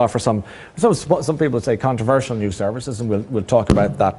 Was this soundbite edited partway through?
yes; 1 cut; at 1.6 s

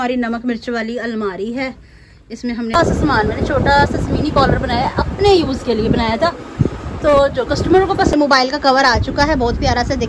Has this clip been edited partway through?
yes; 2 cuts; at 2.8 s, 8.1 s

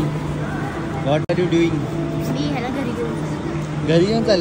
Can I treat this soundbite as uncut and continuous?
yes; 0 cuts

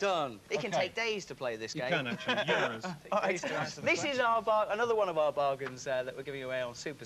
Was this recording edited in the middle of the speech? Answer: no; 0 cuts

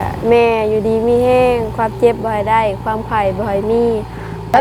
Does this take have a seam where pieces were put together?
no; 0 cuts

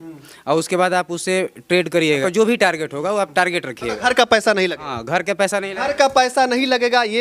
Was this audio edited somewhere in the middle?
yes; 1 cut; at 2.2 s

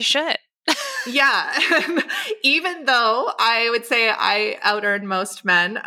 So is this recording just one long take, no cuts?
yes; 0 cuts

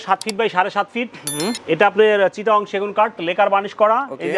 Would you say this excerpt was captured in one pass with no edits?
yes; 0 cuts

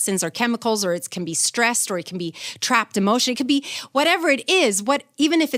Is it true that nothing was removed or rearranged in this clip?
yes; 0 cuts

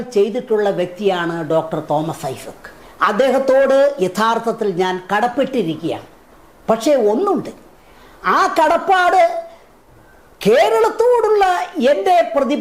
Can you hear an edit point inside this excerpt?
no; 0 cuts

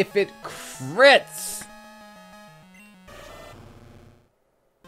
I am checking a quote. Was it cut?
no; 0 cuts

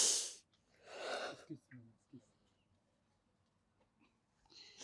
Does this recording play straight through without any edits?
yes; 0 cuts

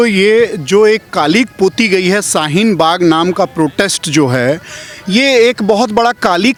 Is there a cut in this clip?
no; 0 cuts

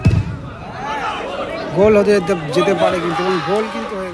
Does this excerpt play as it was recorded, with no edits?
yes; 0 cuts

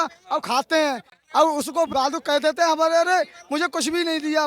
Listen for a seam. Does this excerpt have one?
yes; 1 cut; at 1.9 s

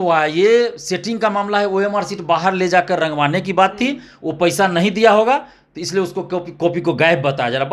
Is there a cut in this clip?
no; 0 cuts

